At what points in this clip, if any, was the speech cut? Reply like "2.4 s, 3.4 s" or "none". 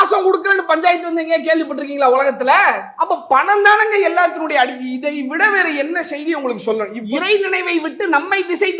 2.9 s, 7.0 s